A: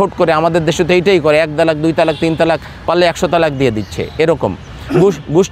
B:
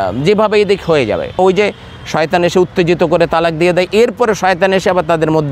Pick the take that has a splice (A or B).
B